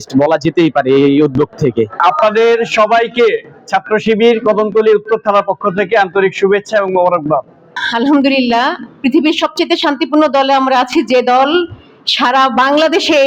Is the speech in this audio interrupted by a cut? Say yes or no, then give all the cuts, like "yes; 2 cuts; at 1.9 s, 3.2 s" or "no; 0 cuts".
yes; 2 cuts; at 2.0 s, 7.8 s